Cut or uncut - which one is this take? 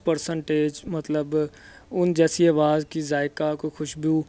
uncut